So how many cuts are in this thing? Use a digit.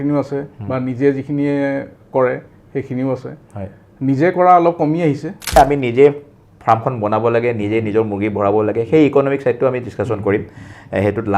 1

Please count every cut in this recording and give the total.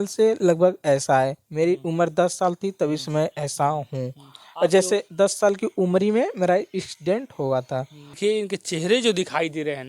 1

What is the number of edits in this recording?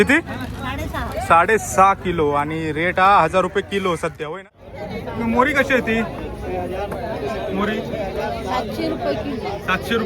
1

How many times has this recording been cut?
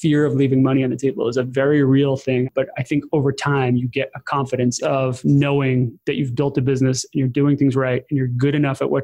2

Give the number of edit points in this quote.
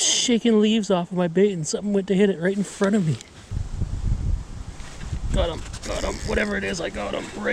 1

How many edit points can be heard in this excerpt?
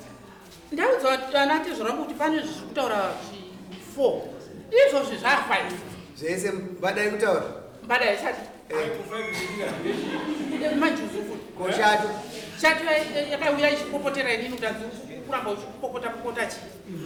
0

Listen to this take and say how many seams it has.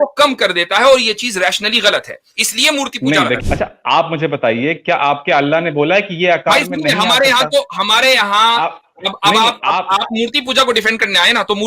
1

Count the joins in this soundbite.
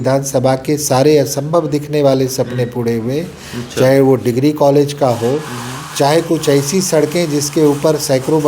0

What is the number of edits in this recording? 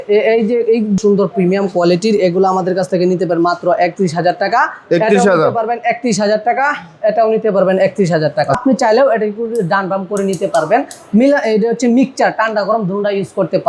2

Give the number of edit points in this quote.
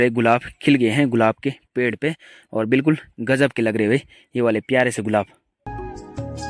0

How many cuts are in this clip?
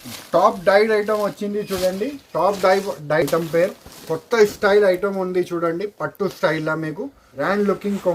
1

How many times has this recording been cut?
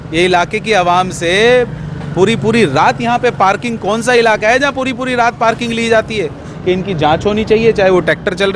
1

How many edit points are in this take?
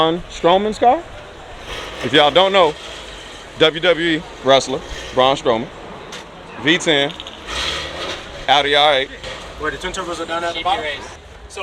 0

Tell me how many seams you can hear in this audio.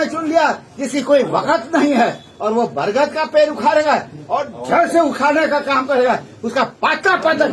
0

